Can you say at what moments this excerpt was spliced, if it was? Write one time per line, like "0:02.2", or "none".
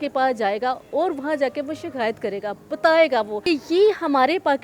0:03.4